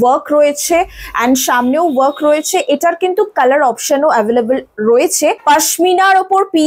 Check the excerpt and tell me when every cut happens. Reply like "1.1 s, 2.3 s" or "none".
5.4 s